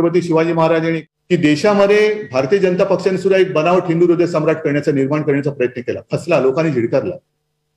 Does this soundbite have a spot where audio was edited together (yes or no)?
yes